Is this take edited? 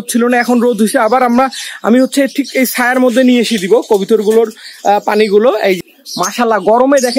yes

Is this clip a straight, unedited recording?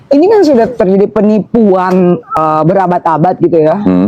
no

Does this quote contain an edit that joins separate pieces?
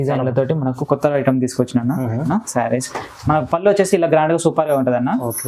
yes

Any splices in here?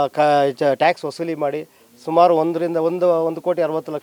no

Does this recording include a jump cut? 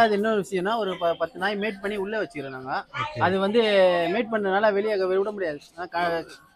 no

